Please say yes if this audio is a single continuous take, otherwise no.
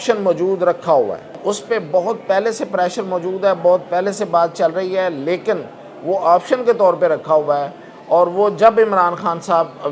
no